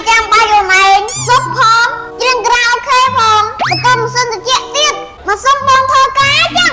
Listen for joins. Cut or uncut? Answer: uncut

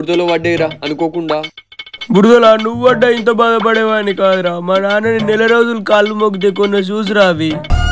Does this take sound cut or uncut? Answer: uncut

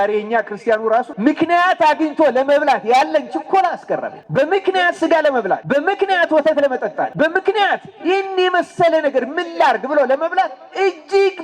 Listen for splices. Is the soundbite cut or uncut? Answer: cut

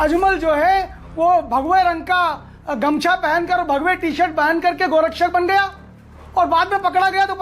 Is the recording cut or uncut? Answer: uncut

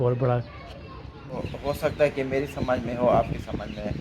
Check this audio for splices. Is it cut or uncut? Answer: cut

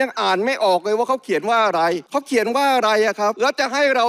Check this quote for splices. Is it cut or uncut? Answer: cut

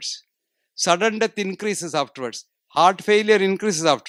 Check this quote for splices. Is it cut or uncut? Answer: uncut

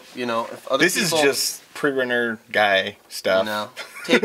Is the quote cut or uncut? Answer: uncut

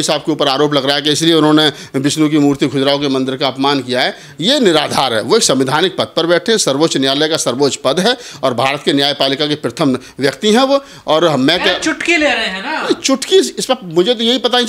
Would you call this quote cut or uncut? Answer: uncut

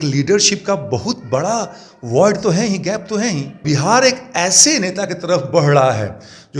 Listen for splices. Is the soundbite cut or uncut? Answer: cut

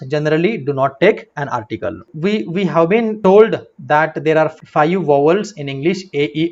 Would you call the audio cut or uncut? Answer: cut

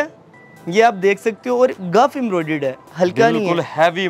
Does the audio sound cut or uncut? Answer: uncut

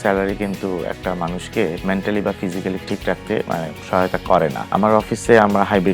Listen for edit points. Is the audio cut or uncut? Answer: cut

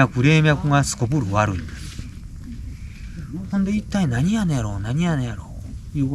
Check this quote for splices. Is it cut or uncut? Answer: uncut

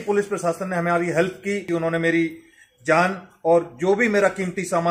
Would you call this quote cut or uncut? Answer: cut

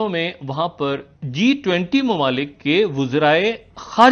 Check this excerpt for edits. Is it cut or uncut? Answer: cut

